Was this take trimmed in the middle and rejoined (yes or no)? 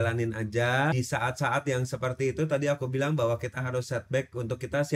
yes